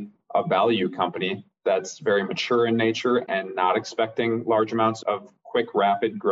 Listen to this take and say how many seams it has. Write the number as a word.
one